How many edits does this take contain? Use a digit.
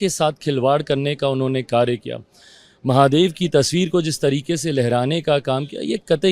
0